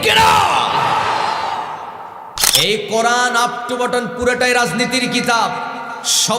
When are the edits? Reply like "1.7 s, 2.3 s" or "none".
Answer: 2.5 s